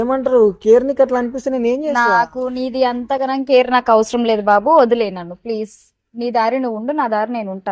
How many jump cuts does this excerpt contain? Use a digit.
0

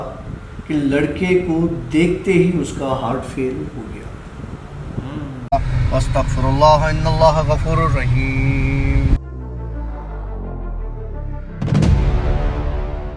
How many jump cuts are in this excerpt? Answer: 1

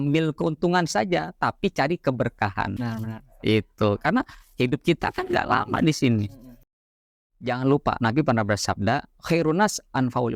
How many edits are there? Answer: 2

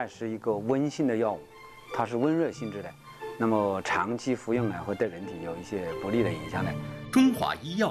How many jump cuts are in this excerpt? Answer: 1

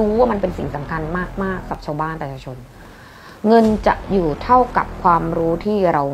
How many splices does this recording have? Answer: 1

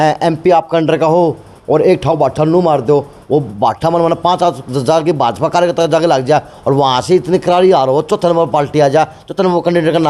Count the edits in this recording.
0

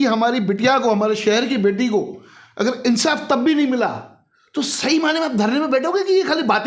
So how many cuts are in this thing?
0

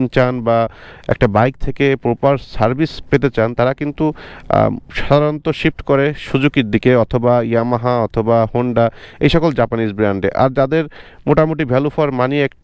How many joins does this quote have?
0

